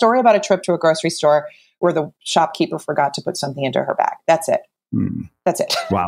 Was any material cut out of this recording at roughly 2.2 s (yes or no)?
yes